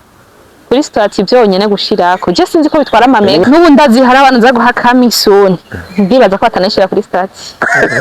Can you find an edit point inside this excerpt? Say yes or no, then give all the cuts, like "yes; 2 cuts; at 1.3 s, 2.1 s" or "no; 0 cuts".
yes; 1 cut; at 3.4 s